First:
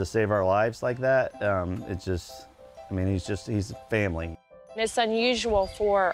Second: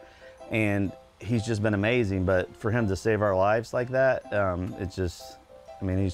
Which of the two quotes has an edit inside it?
first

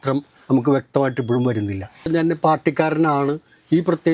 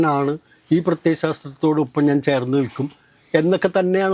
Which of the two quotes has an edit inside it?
first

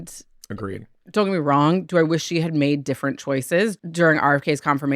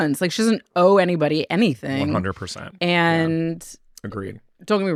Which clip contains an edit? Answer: first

